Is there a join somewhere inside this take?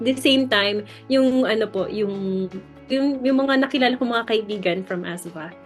yes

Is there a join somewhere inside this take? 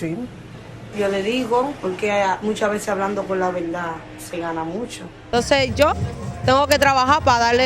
yes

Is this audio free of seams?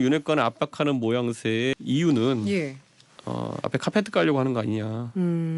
no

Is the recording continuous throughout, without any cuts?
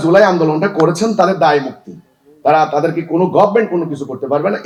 yes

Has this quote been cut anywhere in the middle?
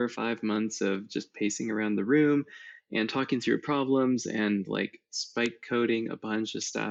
no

